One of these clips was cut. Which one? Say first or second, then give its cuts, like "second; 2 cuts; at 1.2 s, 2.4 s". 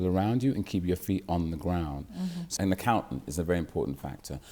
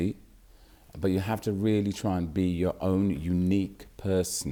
first; 1 cut; at 2.5 s